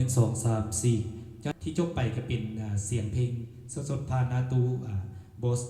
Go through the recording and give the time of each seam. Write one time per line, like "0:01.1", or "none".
0:01.5